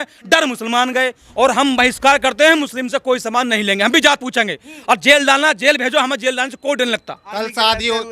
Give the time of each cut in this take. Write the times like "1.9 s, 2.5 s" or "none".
1.2 s, 7.2 s